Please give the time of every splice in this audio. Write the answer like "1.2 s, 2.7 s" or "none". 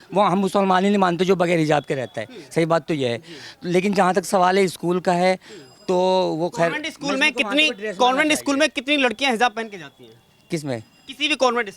none